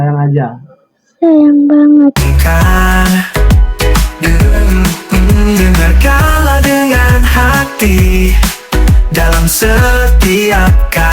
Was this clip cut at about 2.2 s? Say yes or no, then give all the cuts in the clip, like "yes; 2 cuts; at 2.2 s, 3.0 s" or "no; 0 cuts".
yes; 1 cut; at 2.2 s